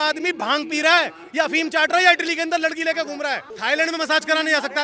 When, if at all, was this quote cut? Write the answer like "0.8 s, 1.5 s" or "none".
3.5 s